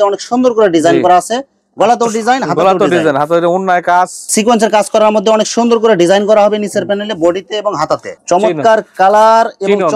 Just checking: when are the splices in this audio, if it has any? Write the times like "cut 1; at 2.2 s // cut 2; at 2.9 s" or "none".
cut 1; at 4.2 s // cut 2; at 8.1 s